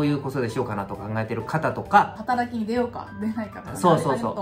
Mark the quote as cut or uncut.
cut